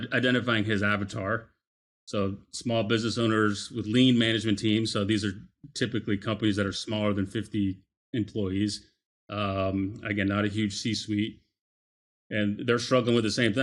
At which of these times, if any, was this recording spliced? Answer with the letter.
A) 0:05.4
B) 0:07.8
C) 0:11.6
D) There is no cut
D